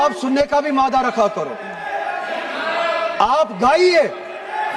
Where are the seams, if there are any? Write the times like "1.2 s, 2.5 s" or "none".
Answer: none